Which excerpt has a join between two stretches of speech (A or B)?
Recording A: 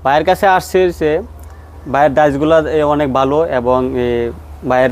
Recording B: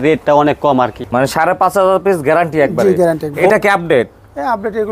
B